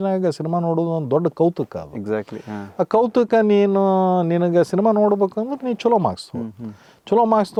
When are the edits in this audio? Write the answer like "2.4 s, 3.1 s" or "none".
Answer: none